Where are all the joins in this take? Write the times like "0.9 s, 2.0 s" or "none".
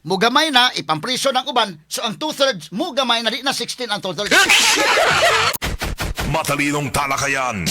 5.5 s